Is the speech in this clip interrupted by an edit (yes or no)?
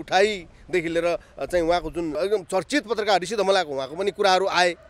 yes